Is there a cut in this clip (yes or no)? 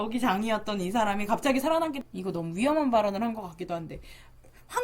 yes